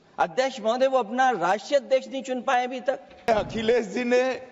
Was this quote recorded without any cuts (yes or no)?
no